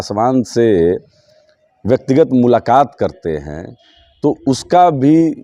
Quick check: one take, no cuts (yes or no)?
yes